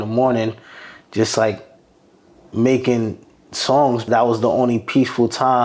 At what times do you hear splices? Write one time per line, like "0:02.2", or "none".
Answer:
0:04.1